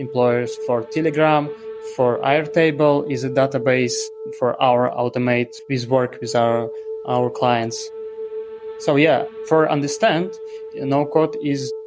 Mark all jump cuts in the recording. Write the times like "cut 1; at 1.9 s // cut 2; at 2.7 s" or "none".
cut 1; at 5.6 s // cut 2; at 8.2 s